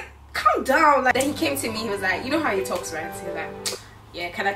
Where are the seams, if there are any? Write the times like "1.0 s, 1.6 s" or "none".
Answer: 1.1 s